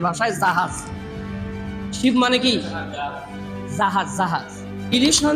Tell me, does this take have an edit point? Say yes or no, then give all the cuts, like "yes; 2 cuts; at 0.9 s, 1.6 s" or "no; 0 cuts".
no; 0 cuts